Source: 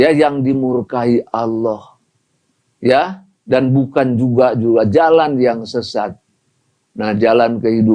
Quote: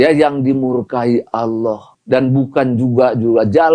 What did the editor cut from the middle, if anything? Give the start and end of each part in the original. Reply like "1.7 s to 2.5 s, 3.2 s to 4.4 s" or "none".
1.9 s to 3.3 s

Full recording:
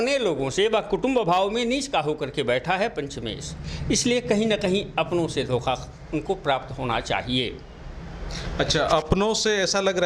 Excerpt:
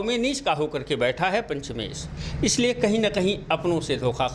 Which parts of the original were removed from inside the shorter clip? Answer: none

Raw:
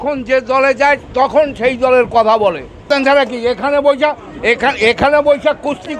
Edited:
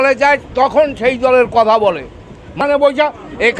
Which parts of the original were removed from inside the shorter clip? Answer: 2.8 s to 3.3 s

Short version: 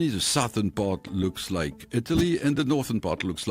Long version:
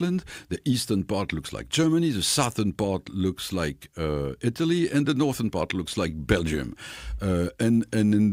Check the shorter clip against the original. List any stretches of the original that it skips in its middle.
3.9 s to 4.3 s

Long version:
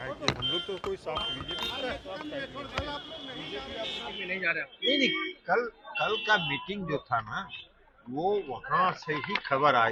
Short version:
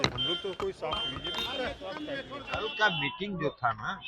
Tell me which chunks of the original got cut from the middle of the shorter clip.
2.7 s to 5.9 s

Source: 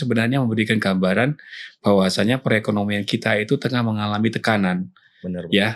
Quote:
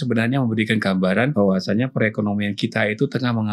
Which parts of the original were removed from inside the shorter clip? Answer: 1.3 s to 1.8 s

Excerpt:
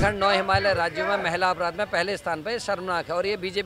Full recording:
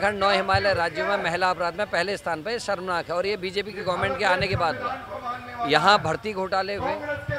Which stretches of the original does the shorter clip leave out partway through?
none

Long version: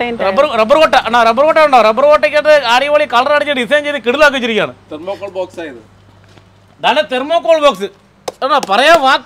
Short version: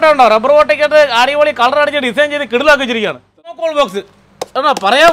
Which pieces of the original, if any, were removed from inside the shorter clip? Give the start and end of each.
5.1 s to 7.4 s

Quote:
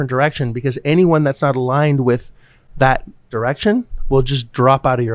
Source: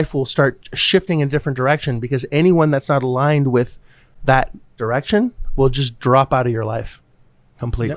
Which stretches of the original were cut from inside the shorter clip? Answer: none

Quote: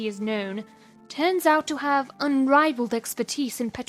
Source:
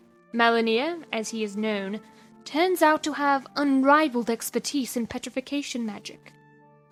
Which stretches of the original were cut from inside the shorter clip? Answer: none

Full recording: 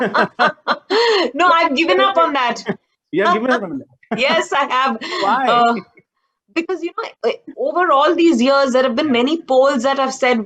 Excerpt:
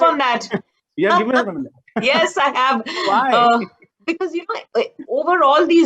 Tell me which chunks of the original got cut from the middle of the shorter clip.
6.0 s to 6.3 s

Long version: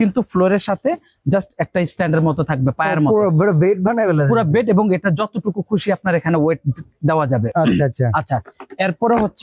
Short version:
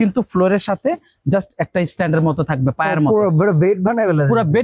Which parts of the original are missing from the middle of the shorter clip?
none

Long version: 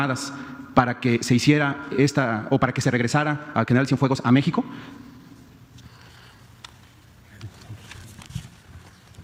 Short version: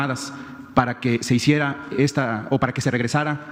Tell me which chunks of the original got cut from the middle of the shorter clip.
none

